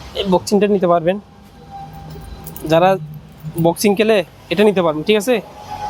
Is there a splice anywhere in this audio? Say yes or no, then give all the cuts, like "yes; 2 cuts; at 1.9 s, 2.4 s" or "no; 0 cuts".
no; 0 cuts